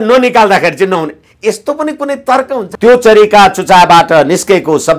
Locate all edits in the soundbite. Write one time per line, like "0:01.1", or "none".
0:02.7

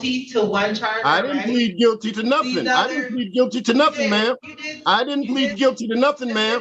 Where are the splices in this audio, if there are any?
none

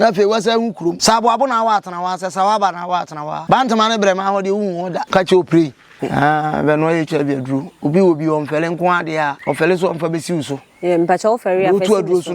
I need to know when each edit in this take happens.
0:01.0
0:03.3
0:05.0
0:06.0
0:09.4

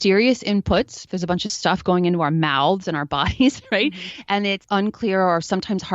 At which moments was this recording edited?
0:01.0
0:04.6

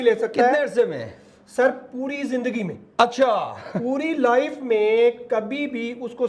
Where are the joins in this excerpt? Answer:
none

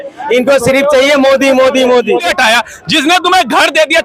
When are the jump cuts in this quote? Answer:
0:02.3

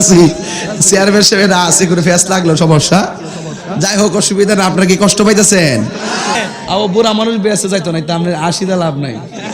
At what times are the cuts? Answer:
0:06.4

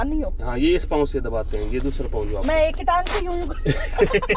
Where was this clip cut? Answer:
none

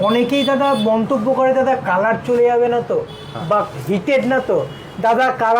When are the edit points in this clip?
0:03.7

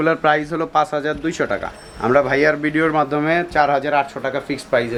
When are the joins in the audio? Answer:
none

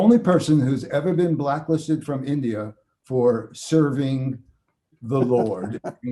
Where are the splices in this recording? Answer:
none

